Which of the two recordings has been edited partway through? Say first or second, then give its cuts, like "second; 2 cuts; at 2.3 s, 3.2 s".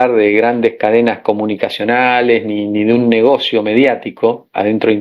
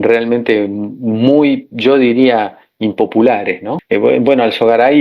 second; 1 cut; at 3.7 s